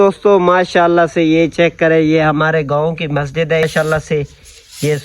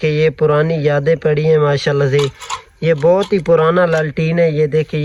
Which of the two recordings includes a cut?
first; 1 cut; at 3.7 s

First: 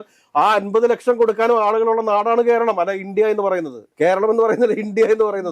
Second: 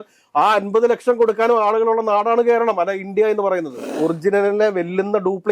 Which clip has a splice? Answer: second; 1 cut; at 3.9 s

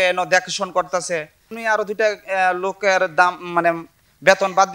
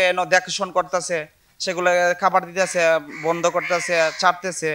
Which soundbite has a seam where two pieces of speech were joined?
first; 1 cut; at 1.6 s

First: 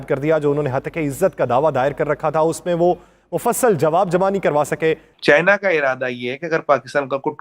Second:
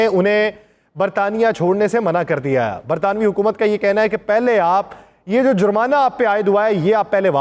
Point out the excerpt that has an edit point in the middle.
first; 1 cut; at 5.1 s

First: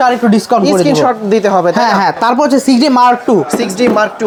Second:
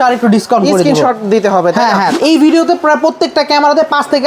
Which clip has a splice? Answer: second; 1 cut; at 2.1 s

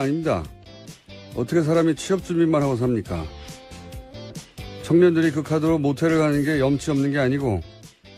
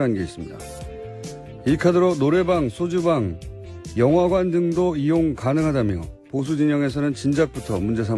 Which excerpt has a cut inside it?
first; 1 cut; at 2.8 s

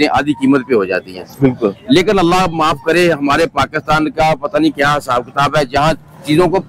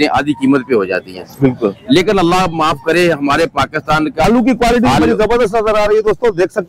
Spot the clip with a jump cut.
second; 1 cut; at 4.2 s

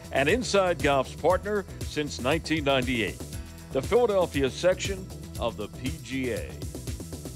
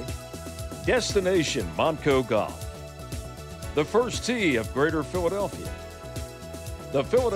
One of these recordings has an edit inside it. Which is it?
first; 1 cut; at 6.5 s

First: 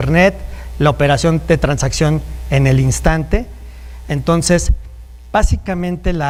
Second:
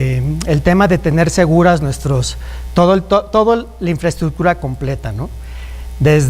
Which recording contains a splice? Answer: second; 1 cut; at 2.4 s

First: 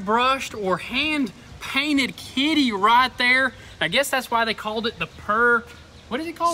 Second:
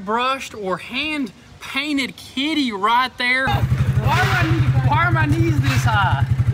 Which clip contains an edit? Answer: second; 1 cut; at 3.5 s

